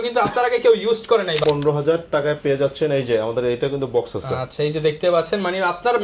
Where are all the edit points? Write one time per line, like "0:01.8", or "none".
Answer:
0:01.4